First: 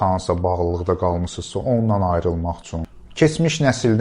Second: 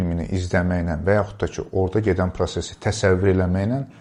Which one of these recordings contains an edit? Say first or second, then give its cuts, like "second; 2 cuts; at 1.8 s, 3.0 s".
first; 1 cut; at 2.8 s